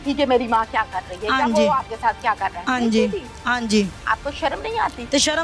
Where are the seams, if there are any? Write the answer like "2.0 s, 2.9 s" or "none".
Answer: 4.0 s